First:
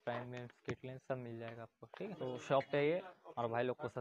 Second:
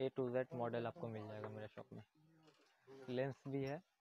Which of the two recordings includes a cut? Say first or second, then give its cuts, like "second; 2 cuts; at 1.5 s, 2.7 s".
first; 2 cuts; at 2.1 s, 3.2 s